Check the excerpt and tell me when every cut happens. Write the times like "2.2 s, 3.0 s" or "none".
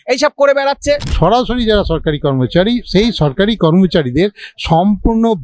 1.1 s

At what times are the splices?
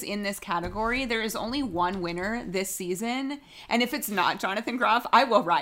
none

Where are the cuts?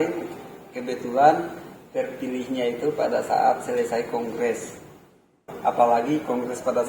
5.5 s

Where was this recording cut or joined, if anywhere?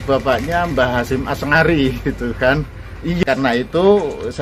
3.2 s

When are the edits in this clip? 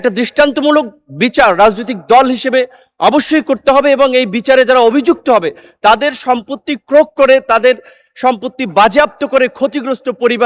none

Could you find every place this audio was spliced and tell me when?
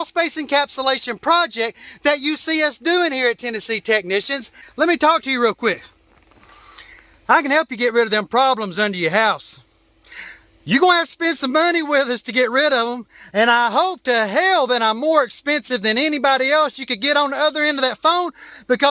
4.6 s

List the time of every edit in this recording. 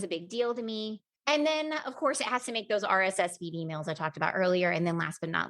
1.1 s

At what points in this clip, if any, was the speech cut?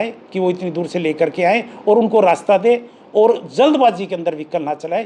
none

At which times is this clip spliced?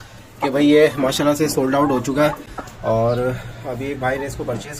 none

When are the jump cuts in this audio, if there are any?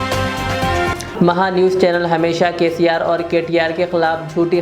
1.0 s

